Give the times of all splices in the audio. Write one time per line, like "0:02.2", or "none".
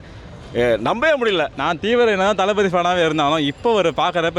0:01.5